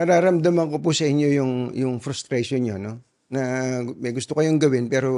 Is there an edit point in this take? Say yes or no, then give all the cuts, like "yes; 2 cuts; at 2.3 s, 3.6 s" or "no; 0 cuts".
no; 0 cuts